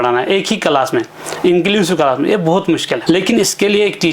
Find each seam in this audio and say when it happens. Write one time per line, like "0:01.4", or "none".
0:03.0